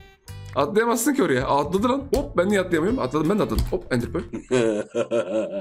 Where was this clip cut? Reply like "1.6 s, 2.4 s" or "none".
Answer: none